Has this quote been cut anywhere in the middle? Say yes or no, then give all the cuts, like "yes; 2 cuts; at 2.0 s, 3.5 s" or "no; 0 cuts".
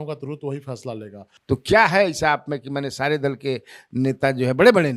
yes; 1 cut; at 1.3 s